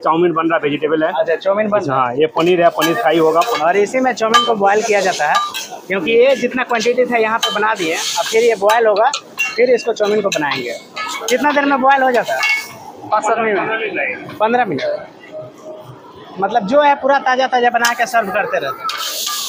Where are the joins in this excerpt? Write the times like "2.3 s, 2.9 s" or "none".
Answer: 3.5 s